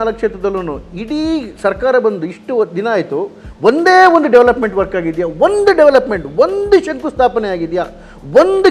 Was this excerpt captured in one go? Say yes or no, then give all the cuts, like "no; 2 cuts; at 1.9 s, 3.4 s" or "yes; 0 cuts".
yes; 0 cuts